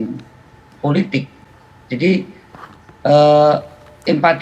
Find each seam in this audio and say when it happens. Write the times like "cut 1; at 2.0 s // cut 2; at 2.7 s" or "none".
none